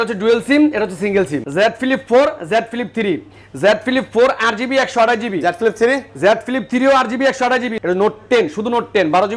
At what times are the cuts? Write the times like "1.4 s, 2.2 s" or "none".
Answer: 1.4 s, 7.7 s